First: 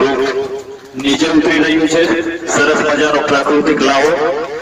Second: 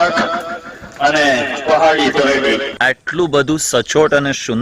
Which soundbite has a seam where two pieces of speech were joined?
second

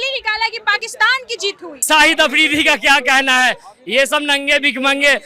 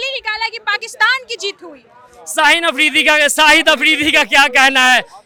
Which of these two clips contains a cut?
first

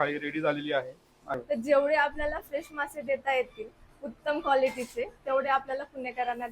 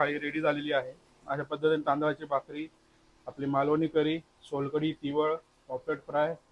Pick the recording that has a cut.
first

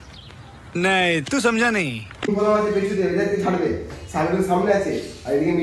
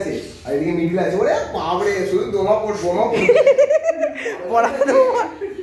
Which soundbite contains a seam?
first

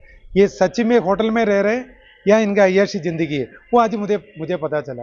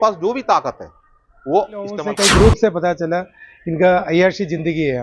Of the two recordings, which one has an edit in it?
second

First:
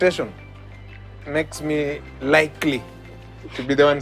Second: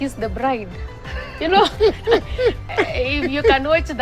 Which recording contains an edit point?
second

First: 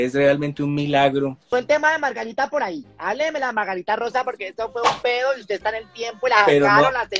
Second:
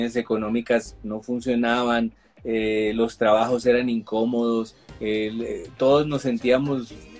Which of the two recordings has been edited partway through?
first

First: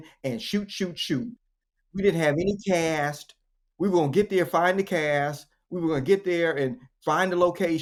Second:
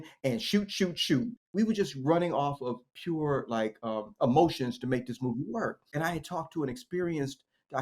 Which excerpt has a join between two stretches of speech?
second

